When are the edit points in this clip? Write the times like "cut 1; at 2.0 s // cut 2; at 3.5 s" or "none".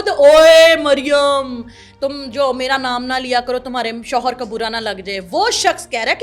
none

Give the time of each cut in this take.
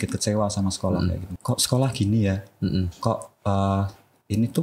cut 1; at 1.3 s

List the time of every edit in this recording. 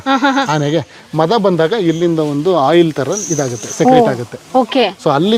none

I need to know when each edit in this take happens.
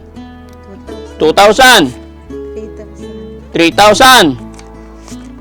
cut 1; at 4.4 s

